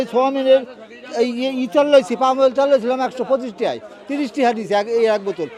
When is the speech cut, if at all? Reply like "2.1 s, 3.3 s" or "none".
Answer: none